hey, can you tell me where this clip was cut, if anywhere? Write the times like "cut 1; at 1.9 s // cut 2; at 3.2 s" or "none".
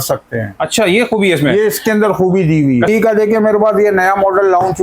cut 1; at 2.9 s